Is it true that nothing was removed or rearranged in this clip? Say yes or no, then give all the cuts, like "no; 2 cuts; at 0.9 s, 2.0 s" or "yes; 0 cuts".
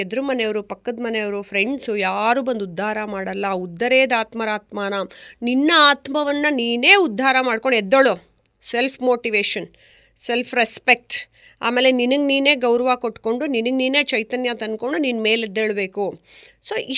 yes; 0 cuts